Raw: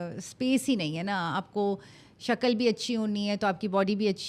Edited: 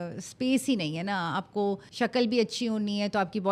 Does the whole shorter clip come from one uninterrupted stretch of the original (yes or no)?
no